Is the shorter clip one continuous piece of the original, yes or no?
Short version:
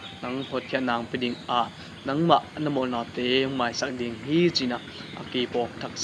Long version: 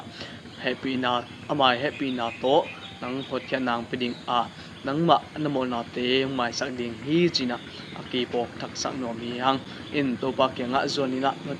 yes